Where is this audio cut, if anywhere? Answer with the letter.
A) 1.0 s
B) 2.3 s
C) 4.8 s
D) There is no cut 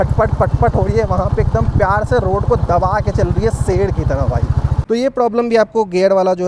C